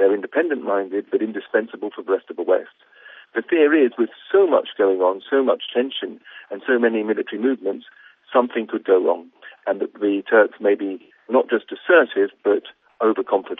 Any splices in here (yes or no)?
no